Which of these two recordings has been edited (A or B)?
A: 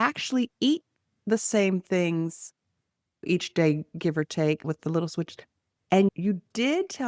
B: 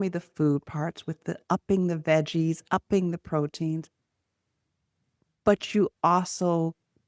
A